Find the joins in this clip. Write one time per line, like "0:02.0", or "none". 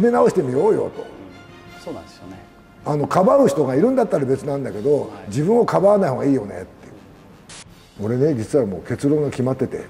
0:07.6